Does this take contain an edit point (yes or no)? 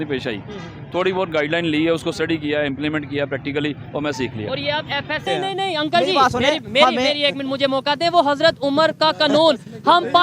yes